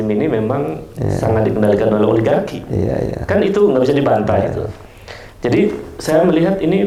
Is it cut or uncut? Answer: uncut